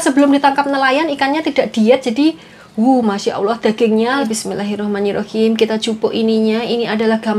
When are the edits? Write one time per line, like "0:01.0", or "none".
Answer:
0:04.3

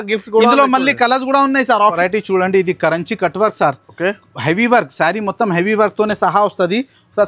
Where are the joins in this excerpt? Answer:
0:01.9

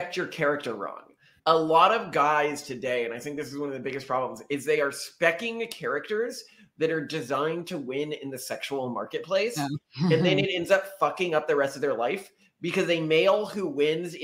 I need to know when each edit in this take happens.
0:01.2

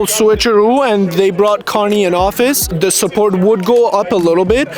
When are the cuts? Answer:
0:02.7

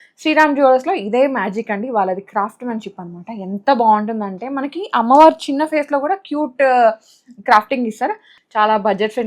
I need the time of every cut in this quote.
0:08.3

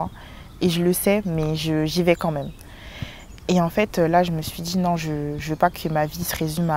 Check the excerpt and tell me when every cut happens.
none

